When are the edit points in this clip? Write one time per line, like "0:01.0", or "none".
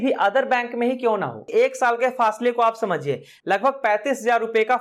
0:01.4